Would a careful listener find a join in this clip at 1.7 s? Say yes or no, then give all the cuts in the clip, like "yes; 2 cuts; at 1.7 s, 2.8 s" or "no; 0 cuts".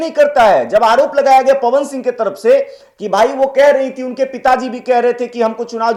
no; 0 cuts